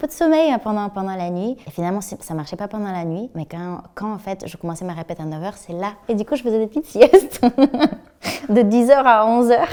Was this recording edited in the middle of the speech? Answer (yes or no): no